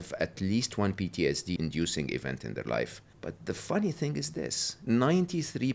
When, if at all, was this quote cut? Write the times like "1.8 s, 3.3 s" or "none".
1.6 s, 3.1 s, 4.7 s

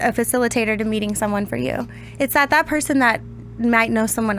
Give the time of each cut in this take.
none

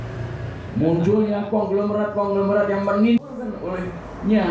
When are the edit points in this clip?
3.2 s

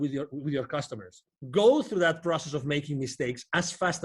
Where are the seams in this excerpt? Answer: 1.3 s

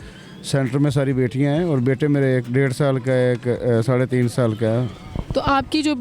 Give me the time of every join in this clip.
none

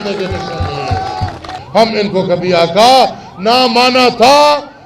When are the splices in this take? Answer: 1.6 s

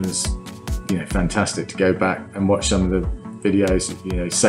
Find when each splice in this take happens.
2.3 s

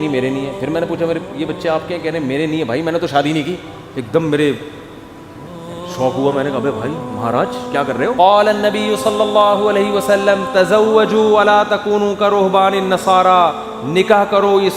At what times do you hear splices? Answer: 8.1 s

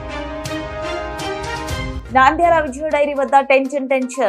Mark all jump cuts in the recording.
2.0 s

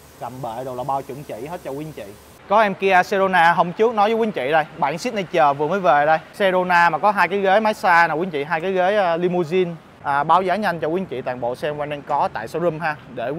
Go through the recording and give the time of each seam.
2.3 s, 6.3 s, 9.9 s

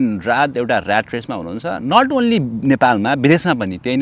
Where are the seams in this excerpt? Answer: none

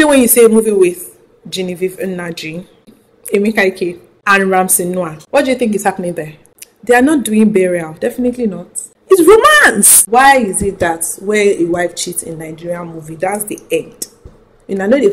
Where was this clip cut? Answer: 10.0 s

